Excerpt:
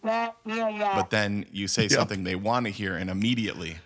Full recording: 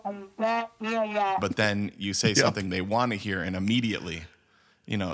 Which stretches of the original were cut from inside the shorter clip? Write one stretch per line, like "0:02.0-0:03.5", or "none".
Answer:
0:01.4-0:01.5